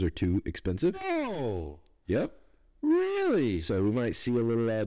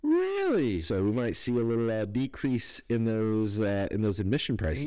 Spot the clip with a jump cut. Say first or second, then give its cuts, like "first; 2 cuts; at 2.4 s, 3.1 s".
first; 1 cut; at 1.0 s